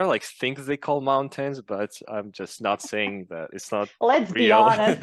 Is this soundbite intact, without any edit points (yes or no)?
yes